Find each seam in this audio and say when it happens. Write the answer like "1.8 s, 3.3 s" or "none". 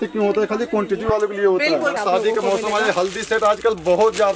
2.0 s